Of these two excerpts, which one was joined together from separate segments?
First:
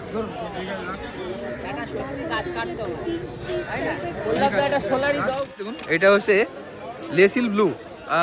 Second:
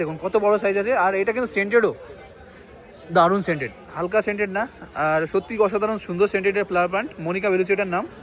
first; 1 cut; at 5.4 s

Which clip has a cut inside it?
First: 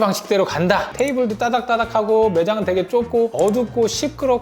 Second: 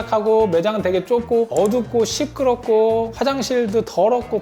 first; 1 cut; at 0.9 s

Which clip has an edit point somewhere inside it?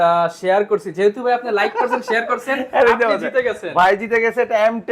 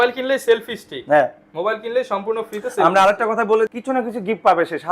second; 1 cut; at 3.7 s

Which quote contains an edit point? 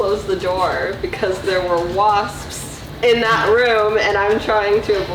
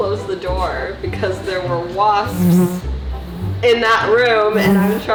first; 1 cut; at 2.3 s

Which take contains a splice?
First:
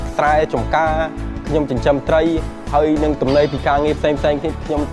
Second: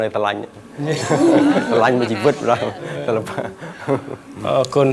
second; 1 cut; at 3.6 s

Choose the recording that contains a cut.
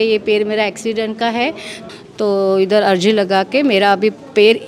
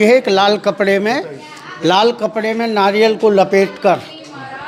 first; 1 cut; at 1.8 s

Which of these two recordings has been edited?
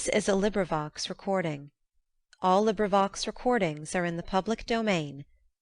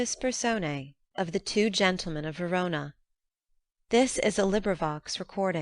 second; 1 cut; at 1.0 s

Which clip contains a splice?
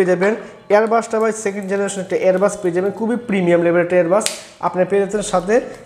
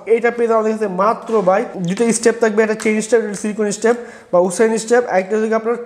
second; 1 cut; at 1.9 s

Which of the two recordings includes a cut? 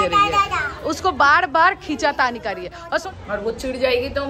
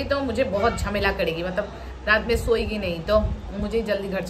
first; 1 cut; at 3.1 s

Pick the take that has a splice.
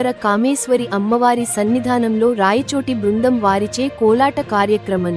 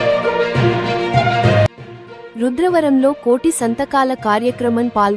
second; 1 cut; at 1.9 s

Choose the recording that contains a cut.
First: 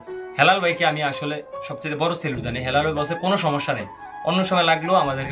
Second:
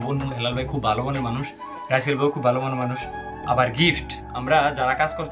second; 1 cut; at 3.1 s

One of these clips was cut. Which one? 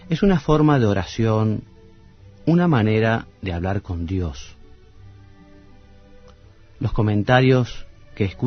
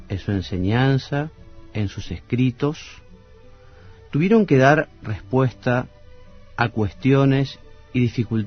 second; 1 cut; at 2.0 s

